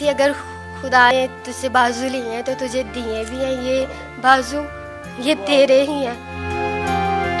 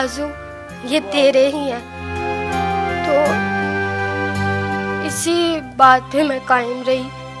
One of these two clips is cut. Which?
first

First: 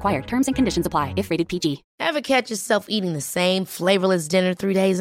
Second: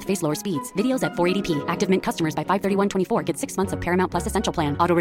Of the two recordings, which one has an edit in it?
first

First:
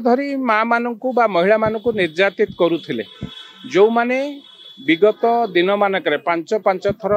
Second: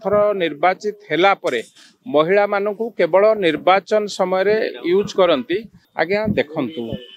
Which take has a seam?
second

